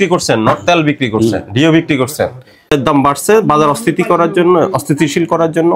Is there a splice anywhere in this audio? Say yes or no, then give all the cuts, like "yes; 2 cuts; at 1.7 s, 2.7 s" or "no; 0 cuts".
yes; 1 cut; at 2.7 s